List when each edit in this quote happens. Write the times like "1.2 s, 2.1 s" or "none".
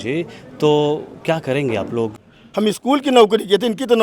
2.2 s

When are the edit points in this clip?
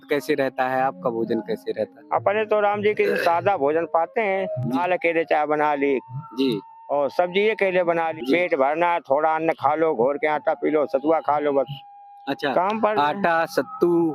4.8 s, 8.1 s

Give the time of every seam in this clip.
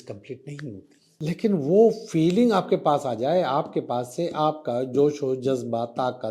1.0 s

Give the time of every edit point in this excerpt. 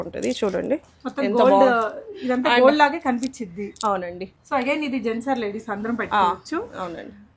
4.3 s

